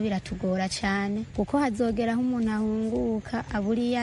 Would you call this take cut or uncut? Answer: uncut